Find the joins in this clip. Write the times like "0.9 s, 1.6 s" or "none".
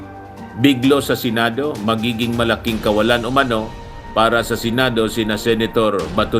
none

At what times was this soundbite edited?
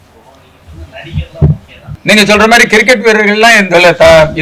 1.9 s

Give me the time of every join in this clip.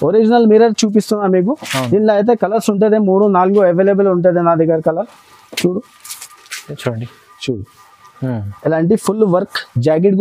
none

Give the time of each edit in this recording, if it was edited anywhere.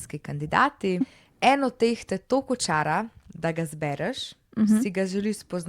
1.1 s

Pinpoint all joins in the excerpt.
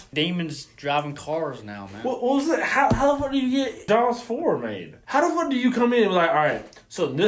3.8 s, 5.0 s

